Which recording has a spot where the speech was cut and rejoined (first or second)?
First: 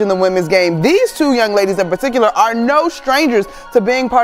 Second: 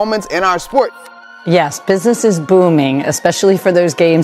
second